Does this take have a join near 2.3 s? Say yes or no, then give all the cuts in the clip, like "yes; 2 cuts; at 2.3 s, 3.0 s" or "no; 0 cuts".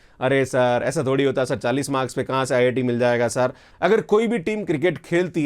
no; 1 cut; at 3.7 s